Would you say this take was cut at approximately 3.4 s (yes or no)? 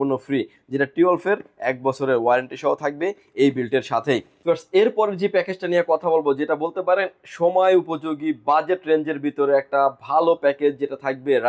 no